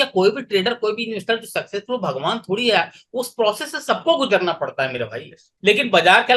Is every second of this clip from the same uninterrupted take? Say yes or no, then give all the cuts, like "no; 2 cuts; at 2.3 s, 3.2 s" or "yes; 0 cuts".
no; 1 cut; at 5.4 s